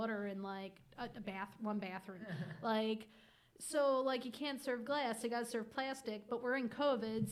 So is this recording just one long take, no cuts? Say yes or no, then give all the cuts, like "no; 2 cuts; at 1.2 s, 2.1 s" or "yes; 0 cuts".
yes; 0 cuts